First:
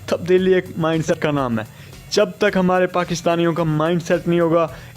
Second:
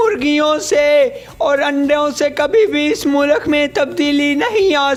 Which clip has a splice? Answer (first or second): first